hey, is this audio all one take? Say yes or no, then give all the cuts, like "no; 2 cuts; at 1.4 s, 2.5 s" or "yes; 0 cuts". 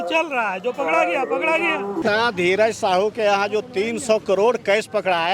no; 1 cut; at 2.0 s